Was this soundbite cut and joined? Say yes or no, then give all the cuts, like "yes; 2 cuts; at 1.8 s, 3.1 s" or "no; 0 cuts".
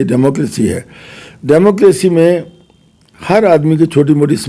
no; 0 cuts